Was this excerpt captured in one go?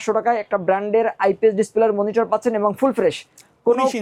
yes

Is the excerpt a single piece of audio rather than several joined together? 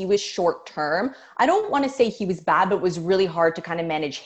yes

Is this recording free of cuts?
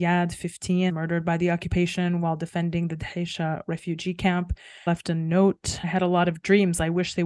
no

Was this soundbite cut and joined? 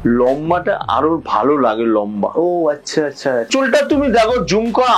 yes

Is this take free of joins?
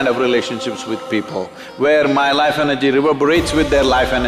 yes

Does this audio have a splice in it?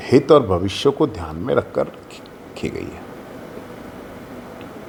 no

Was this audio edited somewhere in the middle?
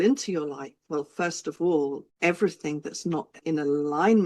yes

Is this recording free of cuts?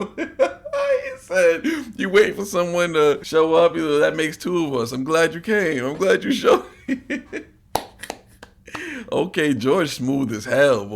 no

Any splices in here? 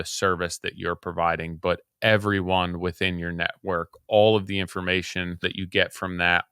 yes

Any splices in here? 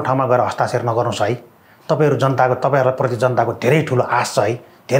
no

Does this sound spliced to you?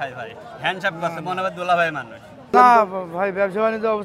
yes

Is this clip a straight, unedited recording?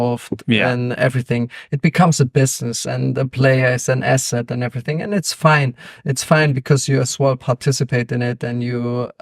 yes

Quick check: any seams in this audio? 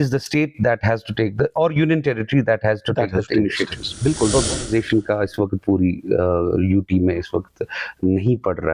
yes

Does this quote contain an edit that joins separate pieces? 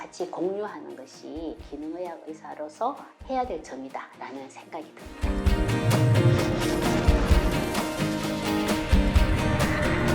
yes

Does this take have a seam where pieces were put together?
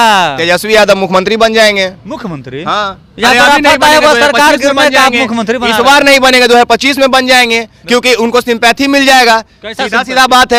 no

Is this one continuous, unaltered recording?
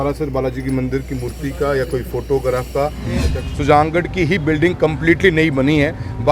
no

